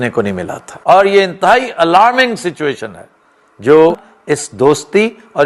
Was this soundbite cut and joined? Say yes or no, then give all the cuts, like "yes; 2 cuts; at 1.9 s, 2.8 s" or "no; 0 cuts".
yes; 2 cuts; at 0.9 s, 4.1 s